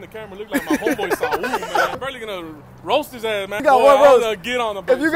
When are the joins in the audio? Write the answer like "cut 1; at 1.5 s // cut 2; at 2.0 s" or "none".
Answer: cut 1; at 2.0 s // cut 2; at 3.6 s